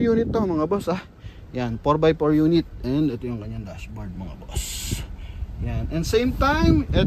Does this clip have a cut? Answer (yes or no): no